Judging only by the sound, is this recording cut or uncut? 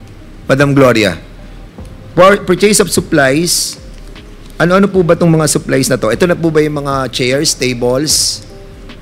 uncut